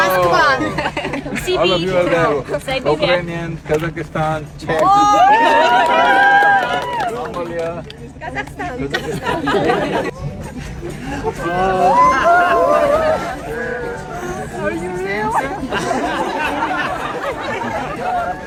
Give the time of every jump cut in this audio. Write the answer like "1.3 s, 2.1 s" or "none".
none